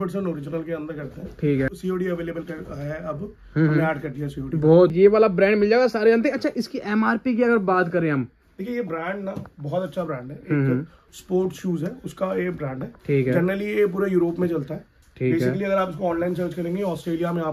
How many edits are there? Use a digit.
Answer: 2